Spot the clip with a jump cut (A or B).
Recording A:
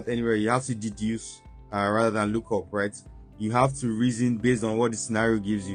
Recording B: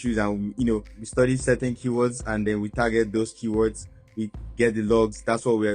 B